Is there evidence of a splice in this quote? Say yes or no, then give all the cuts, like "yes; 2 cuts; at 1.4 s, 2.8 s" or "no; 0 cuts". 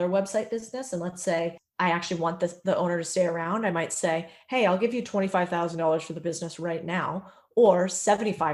yes; 1 cut; at 1.6 s